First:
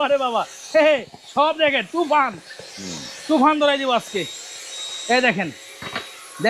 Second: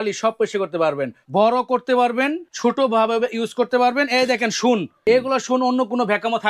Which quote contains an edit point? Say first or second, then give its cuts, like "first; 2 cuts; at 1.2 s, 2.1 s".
second; 3 cuts; at 1.2 s, 2.4 s, 4.9 s